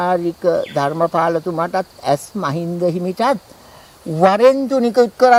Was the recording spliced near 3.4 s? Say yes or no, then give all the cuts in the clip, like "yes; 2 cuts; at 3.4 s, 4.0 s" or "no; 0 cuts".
no; 0 cuts